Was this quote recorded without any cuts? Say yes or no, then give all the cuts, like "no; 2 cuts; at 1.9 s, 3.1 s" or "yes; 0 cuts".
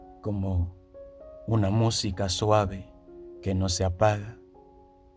yes; 0 cuts